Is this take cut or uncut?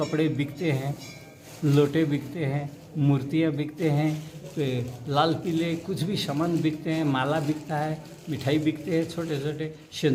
uncut